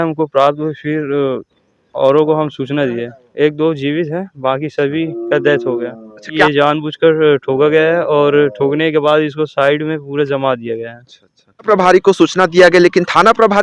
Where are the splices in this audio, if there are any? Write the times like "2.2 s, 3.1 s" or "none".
3.2 s, 6.4 s, 11.7 s

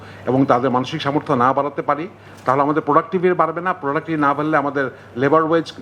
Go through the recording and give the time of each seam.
none

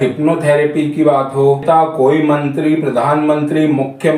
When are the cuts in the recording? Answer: 1.6 s

